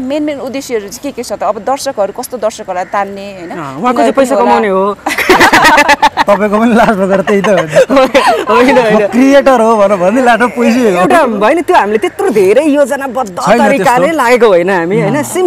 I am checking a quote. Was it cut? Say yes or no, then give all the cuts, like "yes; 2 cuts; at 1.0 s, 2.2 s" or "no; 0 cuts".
no; 0 cuts